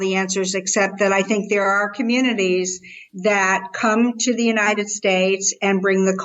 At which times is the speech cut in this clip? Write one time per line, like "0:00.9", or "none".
none

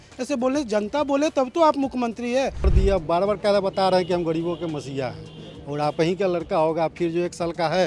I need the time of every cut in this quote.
0:02.7

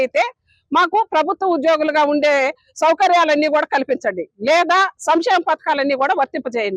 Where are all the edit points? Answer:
0:04.5

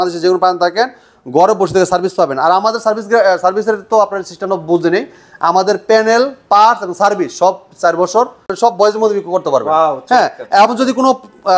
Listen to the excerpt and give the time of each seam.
0:08.6

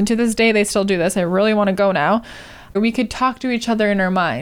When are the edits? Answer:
0:02.8

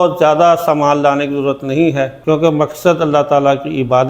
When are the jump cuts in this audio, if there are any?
none

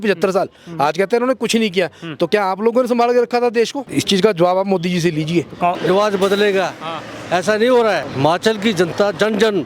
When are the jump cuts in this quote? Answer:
0:03.8
0:05.8
0:08.1

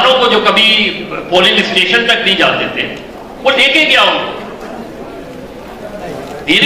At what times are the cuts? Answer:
none

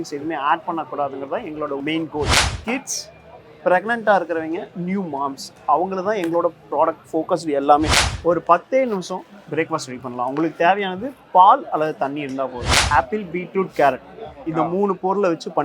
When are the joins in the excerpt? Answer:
0:02.3
0:08.0
0:12.7

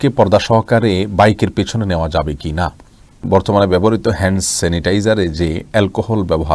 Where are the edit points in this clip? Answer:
0:03.2

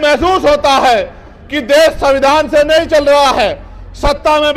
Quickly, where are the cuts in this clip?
none

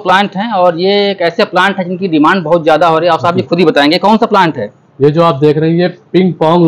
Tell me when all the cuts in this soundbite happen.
none

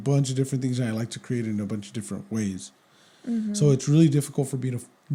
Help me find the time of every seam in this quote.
none

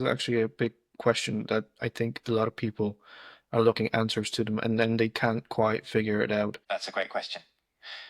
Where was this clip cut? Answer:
0:06.6

